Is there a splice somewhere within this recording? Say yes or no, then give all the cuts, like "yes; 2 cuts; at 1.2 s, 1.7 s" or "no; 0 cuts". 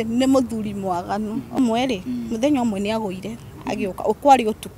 yes; 1 cut; at 1.6 s